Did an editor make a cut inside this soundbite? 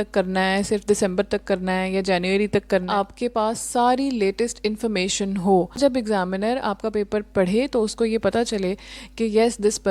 yes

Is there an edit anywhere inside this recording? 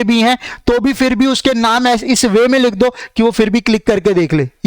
no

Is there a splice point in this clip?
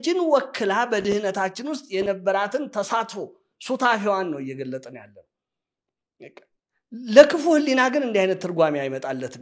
no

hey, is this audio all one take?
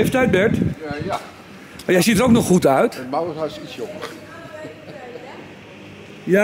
yes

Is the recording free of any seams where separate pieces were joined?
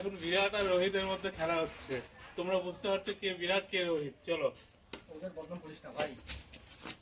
yes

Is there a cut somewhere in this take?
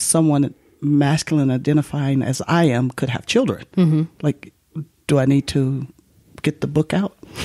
no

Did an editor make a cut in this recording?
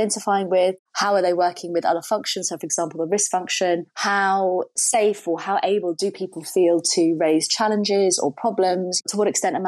no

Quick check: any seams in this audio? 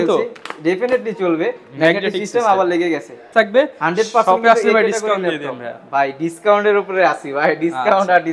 yes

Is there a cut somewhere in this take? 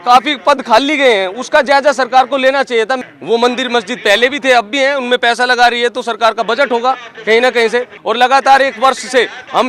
yes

